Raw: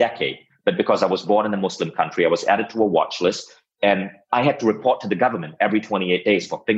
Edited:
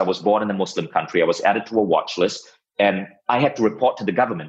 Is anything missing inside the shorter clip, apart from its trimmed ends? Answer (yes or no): no